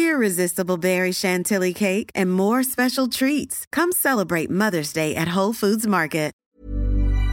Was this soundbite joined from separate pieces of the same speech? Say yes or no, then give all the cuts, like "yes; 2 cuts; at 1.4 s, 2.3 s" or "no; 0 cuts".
yes; 1 cut; at 6.4 s